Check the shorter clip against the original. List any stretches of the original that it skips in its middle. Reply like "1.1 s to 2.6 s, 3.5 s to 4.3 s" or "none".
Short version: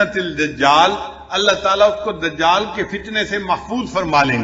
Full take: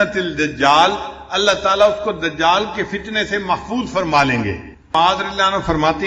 none